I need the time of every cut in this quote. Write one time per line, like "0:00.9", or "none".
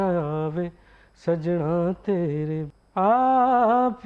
0:02.7